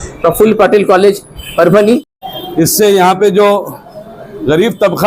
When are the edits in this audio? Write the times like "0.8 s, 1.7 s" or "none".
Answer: 2.1 s

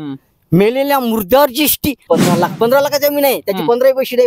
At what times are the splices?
2.0 s

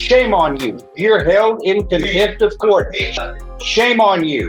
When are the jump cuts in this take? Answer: 3.2 s

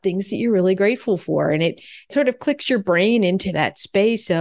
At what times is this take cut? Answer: 2.1 s

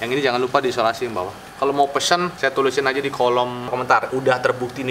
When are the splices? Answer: 1.4 s, 3.7 s

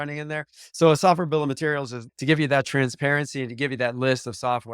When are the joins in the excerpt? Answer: 2.0 s

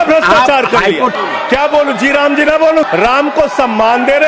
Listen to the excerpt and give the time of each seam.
1.1 s, 2.9 s

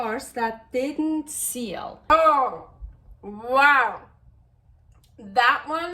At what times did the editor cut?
2.1 s

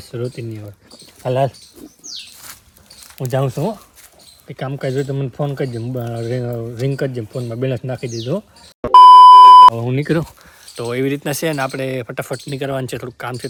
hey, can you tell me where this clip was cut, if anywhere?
none

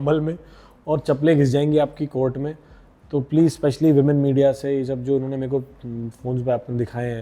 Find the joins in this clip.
none

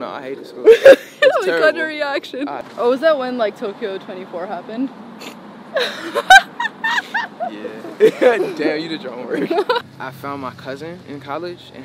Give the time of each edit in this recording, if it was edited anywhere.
2.6 s, 9.9 s

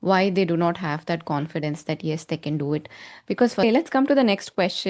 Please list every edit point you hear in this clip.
3.6 s

